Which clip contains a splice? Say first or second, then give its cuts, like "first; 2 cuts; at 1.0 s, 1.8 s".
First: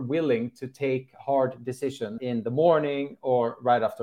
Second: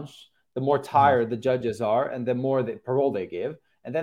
first; 1 cut; at 2.2 s